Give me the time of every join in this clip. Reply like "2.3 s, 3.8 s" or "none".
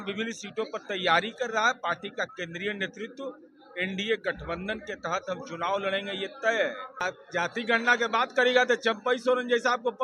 7.0 s